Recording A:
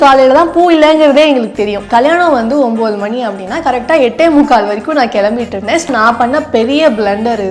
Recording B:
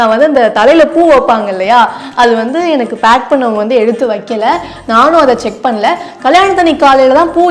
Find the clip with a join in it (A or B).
A